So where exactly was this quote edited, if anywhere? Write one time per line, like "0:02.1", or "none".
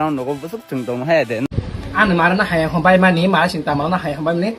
0:01.5